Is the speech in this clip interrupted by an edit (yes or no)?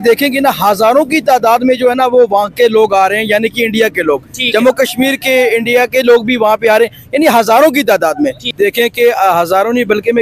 yes